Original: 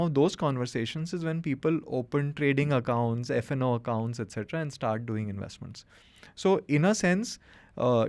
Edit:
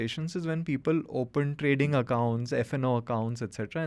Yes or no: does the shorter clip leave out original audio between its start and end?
no